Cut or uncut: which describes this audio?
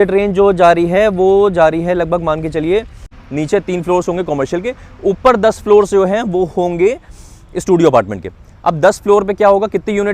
cut